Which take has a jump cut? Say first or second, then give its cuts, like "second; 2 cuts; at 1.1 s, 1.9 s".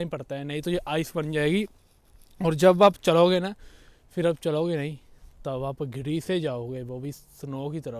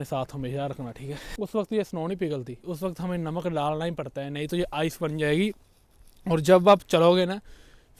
second; 1 cut; at 1.2 s